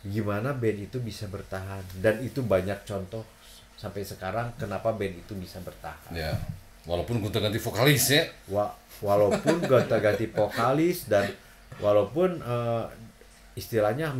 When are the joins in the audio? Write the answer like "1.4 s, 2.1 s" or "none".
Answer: none

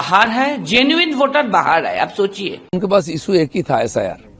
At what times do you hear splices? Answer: 2.7 s

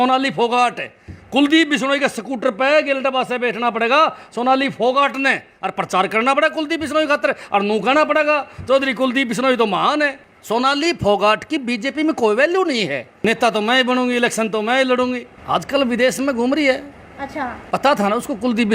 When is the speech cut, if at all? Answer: 10.3 s, 13.0 s, 15.3 s

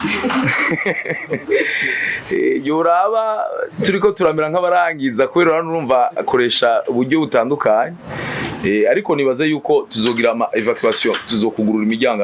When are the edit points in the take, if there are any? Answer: none

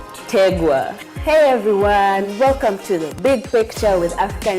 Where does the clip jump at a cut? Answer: 0.9 s

